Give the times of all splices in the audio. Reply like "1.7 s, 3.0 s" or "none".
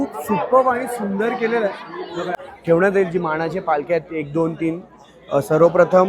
2.3 s